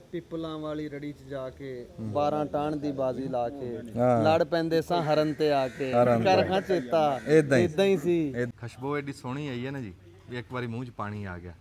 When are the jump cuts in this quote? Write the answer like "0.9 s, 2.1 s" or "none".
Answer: 8.5 s